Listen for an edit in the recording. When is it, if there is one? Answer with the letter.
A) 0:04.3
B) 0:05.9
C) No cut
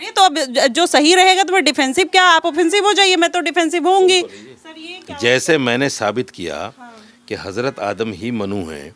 C